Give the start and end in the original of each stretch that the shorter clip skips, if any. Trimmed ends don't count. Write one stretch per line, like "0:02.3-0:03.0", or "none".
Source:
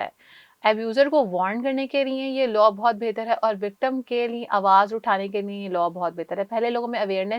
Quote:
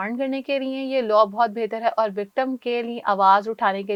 none